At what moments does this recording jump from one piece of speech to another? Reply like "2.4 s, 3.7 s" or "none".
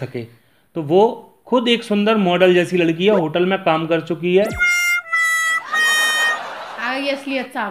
none